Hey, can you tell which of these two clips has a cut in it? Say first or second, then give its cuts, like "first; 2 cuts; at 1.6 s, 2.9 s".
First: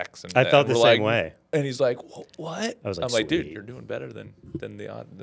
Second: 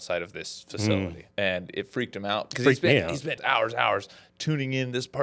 second; 3 cuts; at 1.2 s, 2.5 s, 3.4 s